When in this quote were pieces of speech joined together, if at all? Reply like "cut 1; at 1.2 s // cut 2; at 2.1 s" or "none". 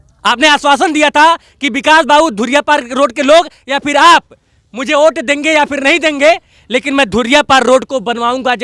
none